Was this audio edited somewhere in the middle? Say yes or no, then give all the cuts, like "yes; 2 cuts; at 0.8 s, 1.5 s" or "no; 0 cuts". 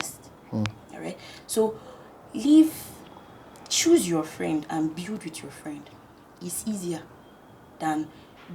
no; 0 cuts